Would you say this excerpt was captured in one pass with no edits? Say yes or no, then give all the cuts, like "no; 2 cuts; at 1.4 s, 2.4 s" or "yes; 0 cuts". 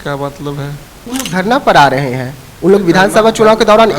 no; 1 cut; at 1.0 s